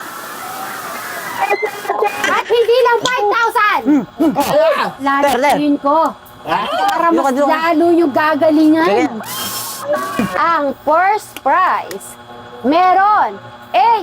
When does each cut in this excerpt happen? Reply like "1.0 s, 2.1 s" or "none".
2.3 s, 10.2 s